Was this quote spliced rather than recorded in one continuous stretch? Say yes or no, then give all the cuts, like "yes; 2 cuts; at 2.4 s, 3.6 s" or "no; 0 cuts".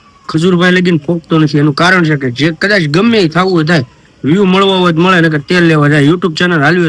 no; 0 cuts